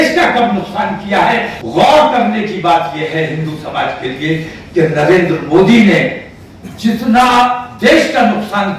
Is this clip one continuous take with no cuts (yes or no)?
no